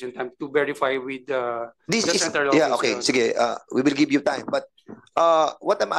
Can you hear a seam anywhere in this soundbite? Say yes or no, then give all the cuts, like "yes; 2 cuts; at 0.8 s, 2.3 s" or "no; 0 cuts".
no; 0 cuts